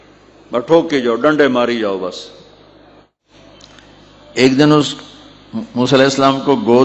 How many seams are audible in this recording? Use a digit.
1